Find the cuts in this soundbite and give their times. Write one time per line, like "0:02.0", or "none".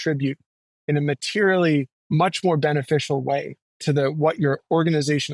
0:02.0